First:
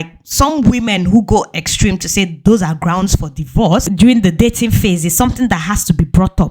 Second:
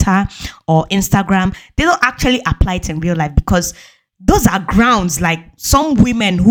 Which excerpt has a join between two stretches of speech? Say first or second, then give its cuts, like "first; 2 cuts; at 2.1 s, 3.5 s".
first; 1 cut; at 3.9 s